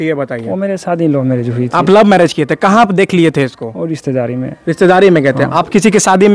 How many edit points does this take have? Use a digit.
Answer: 0